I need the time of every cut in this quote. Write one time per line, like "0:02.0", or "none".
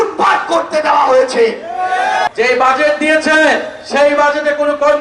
0:02.3